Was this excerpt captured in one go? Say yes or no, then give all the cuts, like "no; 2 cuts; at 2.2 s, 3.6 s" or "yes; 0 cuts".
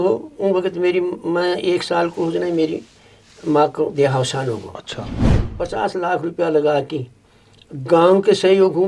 no; 1 cut; at 5.4 s